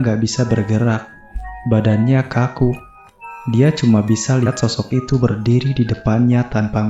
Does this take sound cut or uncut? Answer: uncut